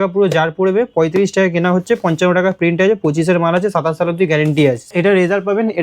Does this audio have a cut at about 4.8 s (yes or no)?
yes